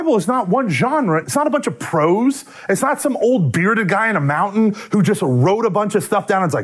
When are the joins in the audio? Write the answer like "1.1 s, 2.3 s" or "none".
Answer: 1.2 s

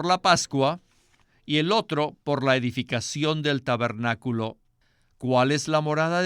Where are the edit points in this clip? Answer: 4.7 s

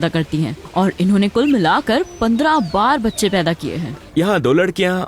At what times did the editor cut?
4.0 s

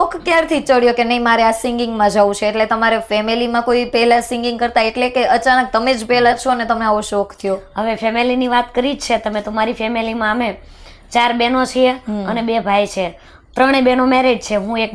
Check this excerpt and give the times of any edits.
none

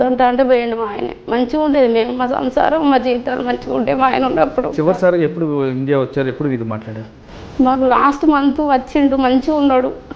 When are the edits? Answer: 4.8 s

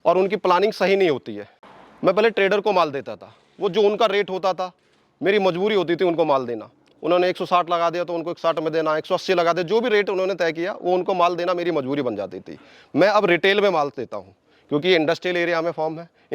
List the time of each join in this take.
1.6 s

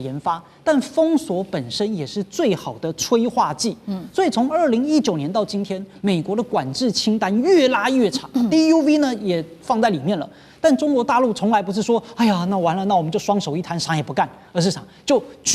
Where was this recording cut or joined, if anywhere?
none

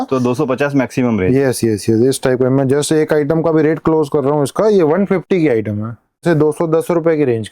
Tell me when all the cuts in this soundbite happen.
6.2 s

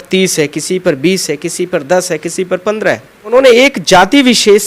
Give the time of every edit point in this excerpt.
3.3 s

